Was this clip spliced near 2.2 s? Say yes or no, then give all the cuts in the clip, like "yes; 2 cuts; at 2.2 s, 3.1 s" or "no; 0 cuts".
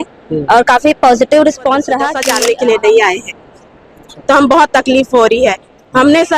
yes; 1 cut; at 2.2 s